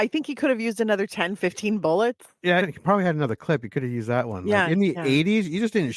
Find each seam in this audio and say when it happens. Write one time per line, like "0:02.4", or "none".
0:02.6